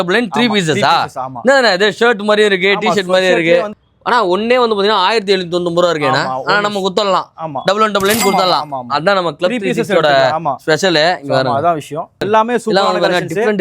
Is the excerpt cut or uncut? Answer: cut